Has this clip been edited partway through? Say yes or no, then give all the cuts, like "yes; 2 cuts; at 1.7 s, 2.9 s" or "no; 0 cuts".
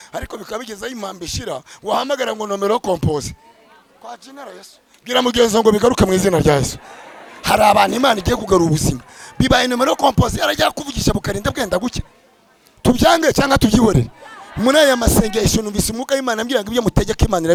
no; 0 cuts